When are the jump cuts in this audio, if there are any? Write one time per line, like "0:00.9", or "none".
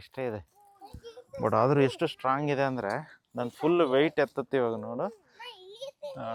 none